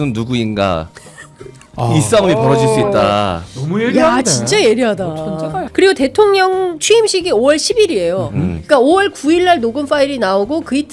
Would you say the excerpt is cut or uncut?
cut